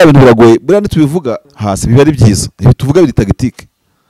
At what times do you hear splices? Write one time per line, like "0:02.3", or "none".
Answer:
0:01.5